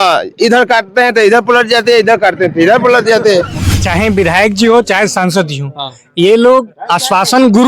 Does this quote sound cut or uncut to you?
cut